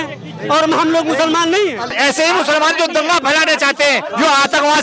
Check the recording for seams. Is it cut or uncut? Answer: cut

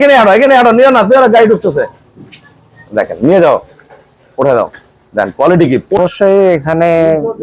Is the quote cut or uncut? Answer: cut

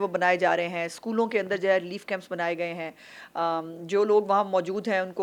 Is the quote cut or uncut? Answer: uncut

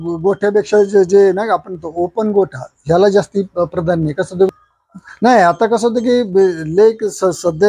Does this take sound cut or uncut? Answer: cut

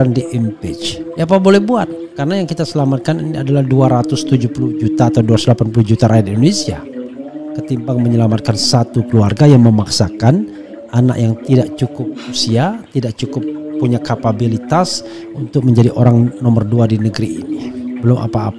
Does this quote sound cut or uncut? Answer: uncut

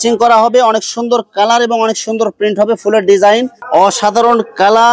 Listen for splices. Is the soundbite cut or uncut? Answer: cut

